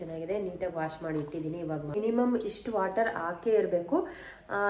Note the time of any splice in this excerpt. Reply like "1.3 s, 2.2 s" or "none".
1.9 s